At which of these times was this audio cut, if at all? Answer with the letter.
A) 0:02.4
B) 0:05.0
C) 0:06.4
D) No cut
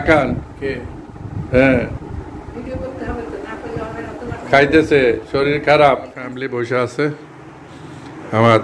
C